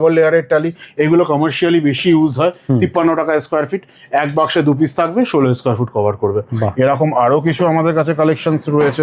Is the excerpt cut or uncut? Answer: uncut